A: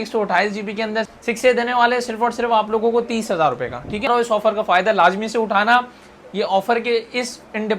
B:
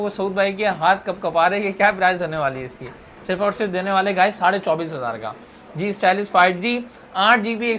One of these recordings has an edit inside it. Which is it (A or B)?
A